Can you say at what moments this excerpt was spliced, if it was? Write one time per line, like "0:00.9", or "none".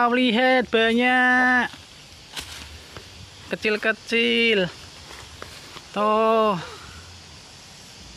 none

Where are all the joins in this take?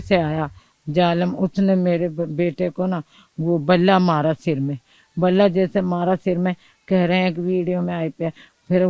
none

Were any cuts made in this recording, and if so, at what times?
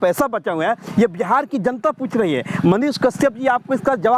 none

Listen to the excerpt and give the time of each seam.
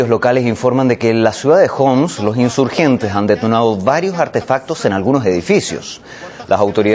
0:03.8

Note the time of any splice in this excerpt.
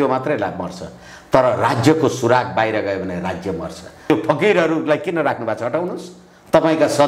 0:04.1

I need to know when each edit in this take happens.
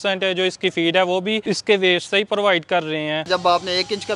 0:01.4
0:03.3

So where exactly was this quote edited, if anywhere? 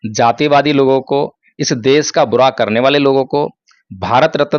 none

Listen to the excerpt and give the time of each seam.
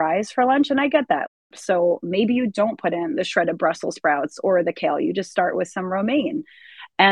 0:01.3

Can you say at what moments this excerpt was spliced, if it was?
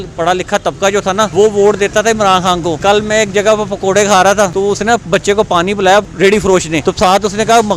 0:01.3
0:02.8
0:04.5
0:06.3

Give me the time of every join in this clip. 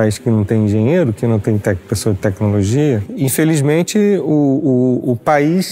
none

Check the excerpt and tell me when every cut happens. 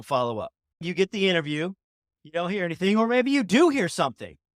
0:00.8
0:02.1

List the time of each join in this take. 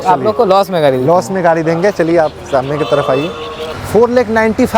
0:03.6

